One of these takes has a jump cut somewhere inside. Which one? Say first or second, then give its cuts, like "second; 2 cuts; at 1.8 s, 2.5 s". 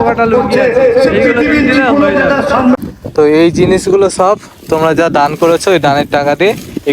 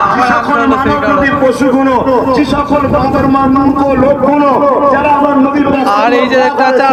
first; 1 cut; at 2.8 s